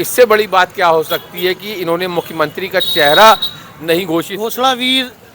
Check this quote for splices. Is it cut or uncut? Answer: cut